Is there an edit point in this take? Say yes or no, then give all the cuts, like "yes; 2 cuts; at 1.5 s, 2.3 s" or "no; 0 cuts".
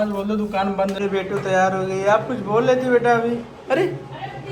yes; 1 cut; at 0.9 s